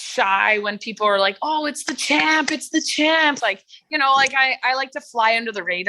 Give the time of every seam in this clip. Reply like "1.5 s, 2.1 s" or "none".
3.4 s